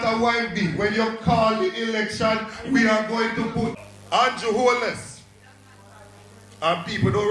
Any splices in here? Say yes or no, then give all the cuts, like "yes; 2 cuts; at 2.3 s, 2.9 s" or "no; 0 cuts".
yes; 1 cut; at 3.7 s